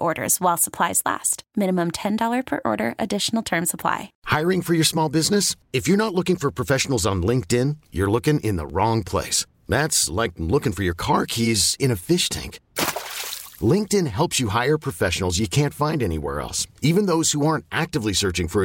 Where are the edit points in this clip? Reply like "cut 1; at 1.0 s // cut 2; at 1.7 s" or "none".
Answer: cut 1; at 4.1 s